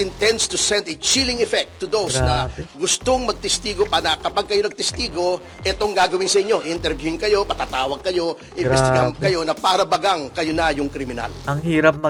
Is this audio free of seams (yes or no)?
yes